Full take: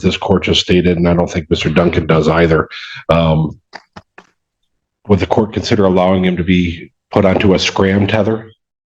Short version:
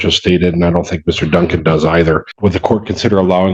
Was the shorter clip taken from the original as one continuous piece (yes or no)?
no